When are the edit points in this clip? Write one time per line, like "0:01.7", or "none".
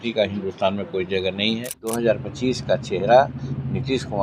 0:01.9